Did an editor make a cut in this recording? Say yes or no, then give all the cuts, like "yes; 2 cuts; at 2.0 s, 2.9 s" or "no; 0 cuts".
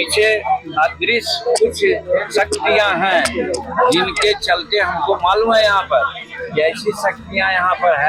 no; 0 cuts